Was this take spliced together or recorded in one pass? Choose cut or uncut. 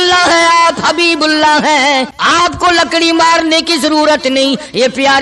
cut